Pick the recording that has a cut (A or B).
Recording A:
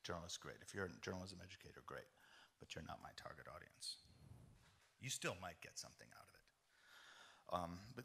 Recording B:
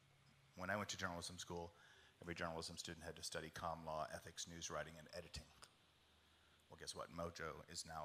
A